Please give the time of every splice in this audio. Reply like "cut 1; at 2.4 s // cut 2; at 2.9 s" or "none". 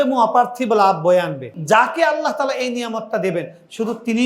cut 1; at 1.6 s